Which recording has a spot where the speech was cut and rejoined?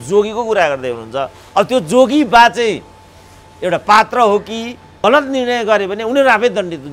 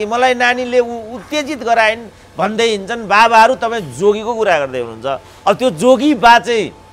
first; 1 cut; at 4.8 s

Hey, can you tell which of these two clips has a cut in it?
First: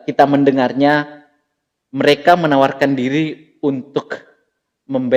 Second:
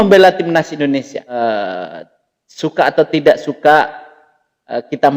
second; 1 cut; at 1.3 s

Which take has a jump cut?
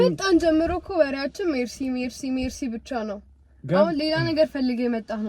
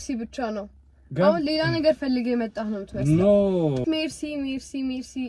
second; 1 cut; at 3.8 s

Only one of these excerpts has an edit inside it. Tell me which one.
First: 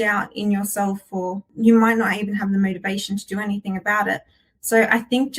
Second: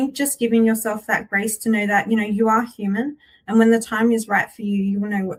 first; 1 cut; at 1.4 s

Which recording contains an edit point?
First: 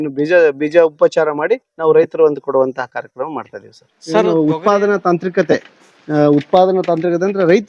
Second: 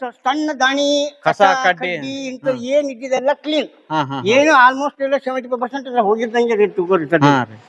first; 1 cut; at 4.3 s

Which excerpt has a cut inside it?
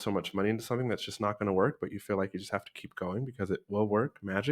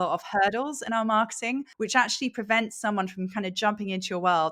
second; 1 cut; at 1.7 s

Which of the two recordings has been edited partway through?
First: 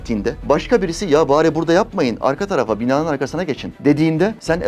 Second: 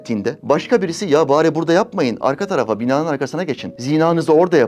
first; 1 cut; at 3.7 s

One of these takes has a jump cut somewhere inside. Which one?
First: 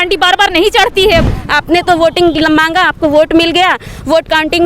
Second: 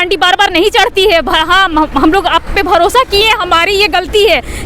first; 1 cut; at 1.3 s

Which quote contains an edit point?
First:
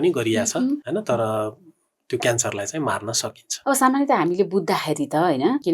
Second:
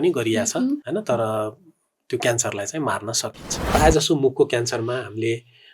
second; 1 cut; at 3.5 s

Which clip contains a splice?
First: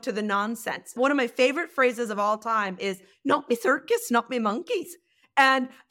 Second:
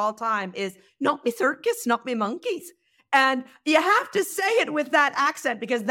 first; 1 cut; at 0.9 s

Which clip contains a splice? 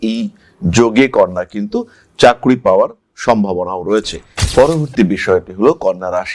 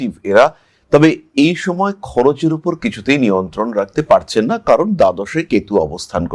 first; 1 cut; at 4.4 s

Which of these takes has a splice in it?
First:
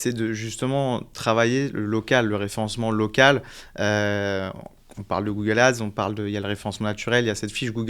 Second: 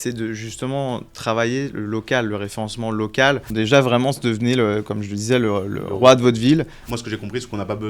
second; 2 cuts; at 3.5 s, 6.8 s

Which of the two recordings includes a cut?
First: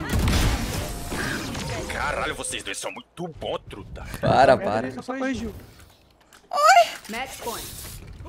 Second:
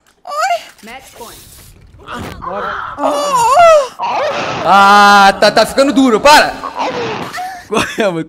second; 1 cut; at 6.6 s

